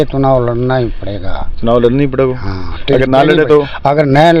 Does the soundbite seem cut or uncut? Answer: uncut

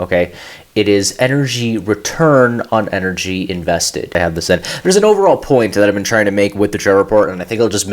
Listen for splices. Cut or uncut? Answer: cut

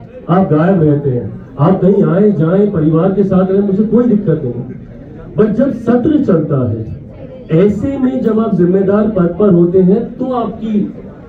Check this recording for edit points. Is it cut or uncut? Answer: uncut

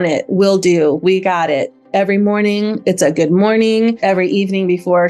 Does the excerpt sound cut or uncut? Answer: cut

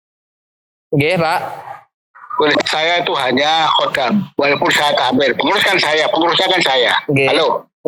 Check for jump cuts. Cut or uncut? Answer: uncut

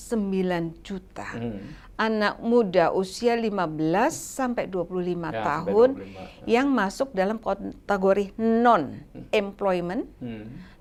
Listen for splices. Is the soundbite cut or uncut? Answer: uncut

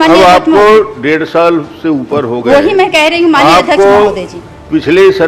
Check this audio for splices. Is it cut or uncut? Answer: uncut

